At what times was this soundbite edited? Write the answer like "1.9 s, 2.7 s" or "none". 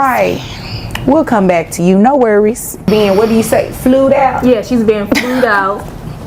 2.9 s